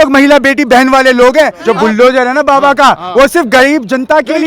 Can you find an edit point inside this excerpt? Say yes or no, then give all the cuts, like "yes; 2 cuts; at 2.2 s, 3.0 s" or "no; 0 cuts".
yes; 1 cut; at 1.6 s